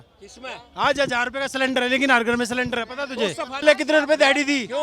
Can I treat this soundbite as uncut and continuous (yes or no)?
no